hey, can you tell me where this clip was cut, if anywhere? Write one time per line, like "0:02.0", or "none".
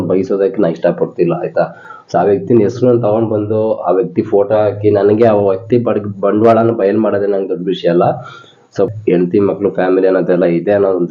0:08.8

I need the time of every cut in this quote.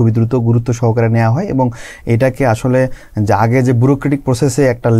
none

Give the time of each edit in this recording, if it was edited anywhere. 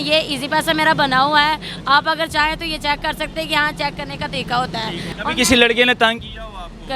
0:05.1

